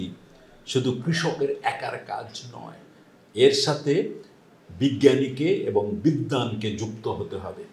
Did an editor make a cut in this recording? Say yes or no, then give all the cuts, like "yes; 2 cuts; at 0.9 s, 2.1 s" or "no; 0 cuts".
no; 0 cuts